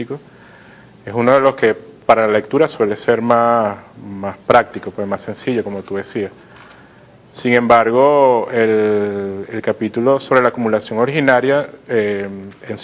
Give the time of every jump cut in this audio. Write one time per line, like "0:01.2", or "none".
0:04.8